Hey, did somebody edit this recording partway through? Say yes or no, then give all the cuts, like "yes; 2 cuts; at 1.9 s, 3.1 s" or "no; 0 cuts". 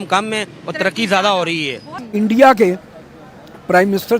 yes; 1 cut; at 1.9 s